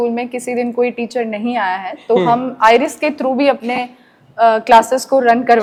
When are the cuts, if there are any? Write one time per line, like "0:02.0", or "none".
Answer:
none